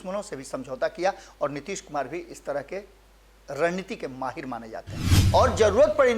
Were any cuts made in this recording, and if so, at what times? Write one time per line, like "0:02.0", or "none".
0:05.1